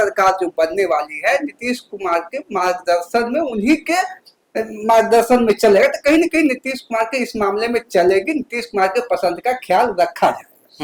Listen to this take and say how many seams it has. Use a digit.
0